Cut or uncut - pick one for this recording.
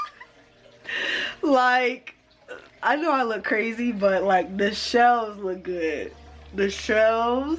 uncut